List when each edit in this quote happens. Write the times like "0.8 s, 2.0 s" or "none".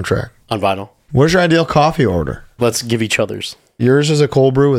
0.9 s, 2.5 s, 3.8 s

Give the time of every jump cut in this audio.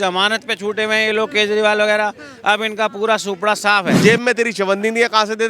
4.0 s

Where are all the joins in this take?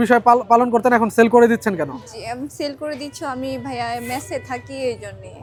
none

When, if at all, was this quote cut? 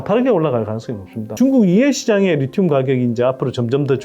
1.3 s

